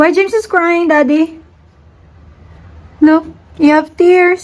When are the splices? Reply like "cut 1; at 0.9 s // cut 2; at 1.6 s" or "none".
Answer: none